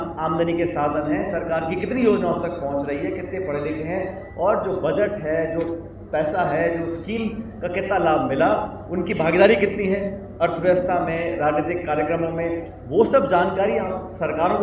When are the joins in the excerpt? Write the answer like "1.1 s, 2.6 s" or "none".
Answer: none